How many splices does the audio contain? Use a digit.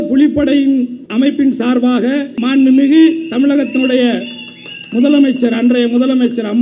2